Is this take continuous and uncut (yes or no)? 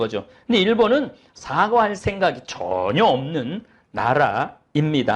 yes